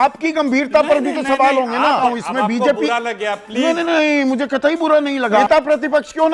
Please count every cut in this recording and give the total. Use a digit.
2